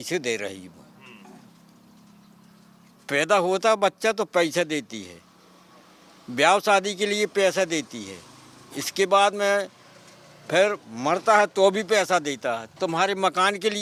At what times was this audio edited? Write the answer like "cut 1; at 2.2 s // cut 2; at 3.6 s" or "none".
none